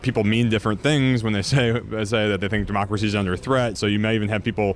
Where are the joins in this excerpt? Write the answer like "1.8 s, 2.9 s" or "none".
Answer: 3.8 s